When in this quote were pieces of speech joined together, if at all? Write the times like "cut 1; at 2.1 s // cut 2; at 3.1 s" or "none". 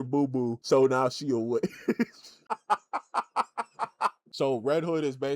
cut 1; at 4.3 s